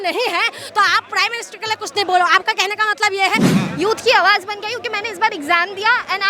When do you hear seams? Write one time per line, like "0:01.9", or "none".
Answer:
0:03.5